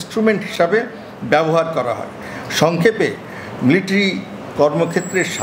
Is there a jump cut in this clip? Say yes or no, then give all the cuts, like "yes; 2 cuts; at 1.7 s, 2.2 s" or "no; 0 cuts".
no; 0 cuts